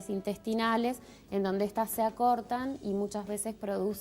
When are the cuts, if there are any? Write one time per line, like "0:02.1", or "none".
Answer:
none